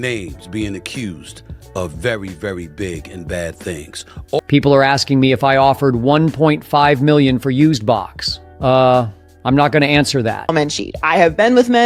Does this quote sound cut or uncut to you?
cut